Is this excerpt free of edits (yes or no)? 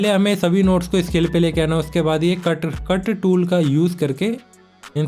yes